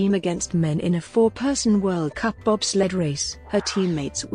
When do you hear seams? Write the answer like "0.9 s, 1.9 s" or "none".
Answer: 3.3 s